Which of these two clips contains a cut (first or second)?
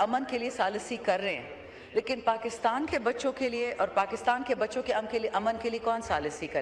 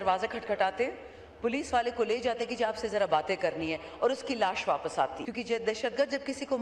second